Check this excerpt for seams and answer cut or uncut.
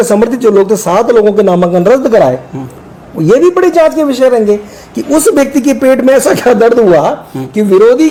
uncut